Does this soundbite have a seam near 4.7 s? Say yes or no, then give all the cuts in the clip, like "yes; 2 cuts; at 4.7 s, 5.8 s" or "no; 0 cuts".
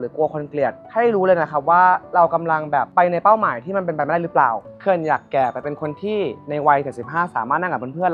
yes; 1 cut; at 4.7 s